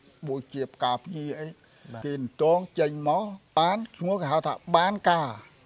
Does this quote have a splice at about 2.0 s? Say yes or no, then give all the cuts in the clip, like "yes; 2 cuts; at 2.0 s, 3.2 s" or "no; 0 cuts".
yes; 2 cuts; at 2.0 s, 3.6 s